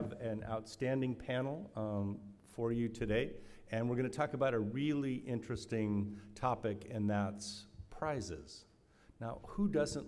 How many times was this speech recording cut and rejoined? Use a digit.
1